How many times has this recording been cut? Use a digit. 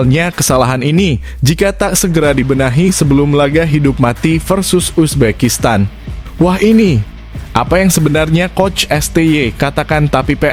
0